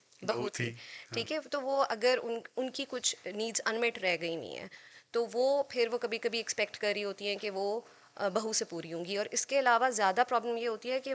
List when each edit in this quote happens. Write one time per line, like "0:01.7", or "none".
none